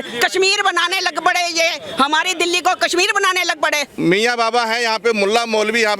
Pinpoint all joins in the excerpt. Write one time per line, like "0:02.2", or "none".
0:03.9